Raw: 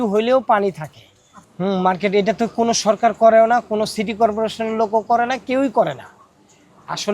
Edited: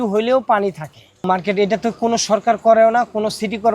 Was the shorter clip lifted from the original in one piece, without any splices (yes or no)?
no